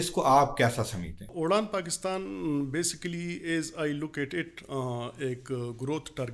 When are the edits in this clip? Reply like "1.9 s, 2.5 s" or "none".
1.3 s

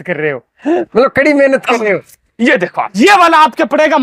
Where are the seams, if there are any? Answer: 2.9 s

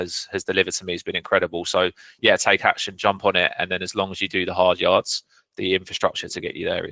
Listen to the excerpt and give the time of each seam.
none

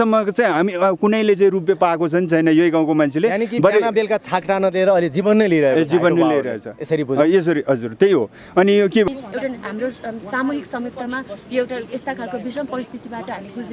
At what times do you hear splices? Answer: 9.1 s

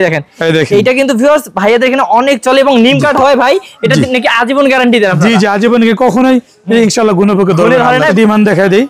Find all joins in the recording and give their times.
8.0 s

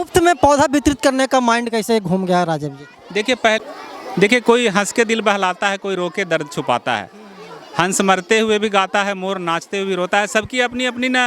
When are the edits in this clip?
3.6 s

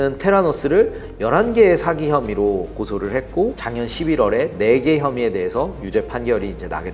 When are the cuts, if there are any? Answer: 3.6 s

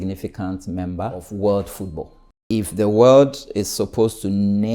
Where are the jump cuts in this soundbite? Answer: 1.3 s, 2.4 s

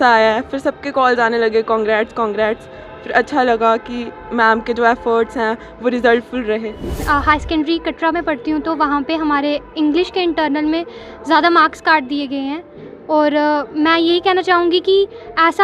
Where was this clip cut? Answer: 7.1 s

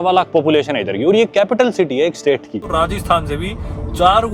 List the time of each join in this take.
2.7 s

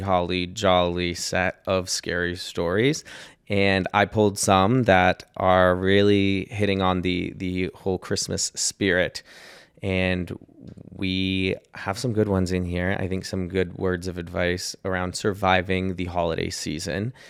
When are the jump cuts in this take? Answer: none

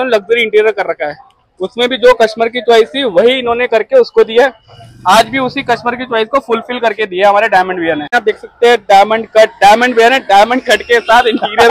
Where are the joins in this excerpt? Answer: 8.2 s

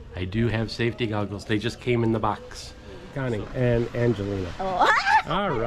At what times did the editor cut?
3.1 s

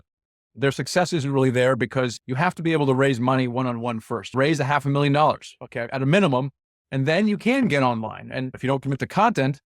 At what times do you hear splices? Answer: 2.2 s, 4.3 s, 8.2 s

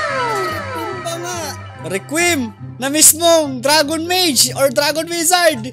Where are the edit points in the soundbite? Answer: 1.3 s

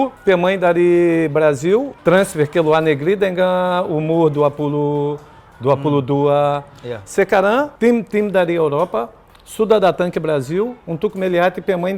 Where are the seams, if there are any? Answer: 1.9 s, 7.7 s

